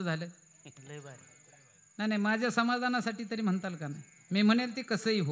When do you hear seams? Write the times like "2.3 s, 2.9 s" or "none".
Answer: none